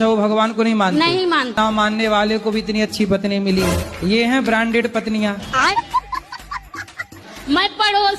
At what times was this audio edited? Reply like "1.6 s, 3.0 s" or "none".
1.6 s